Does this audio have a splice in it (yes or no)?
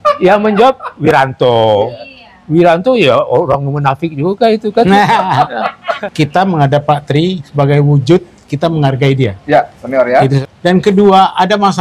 yes